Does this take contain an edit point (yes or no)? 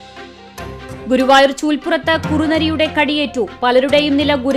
yes